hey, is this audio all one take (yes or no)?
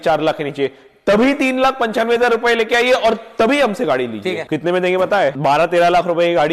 no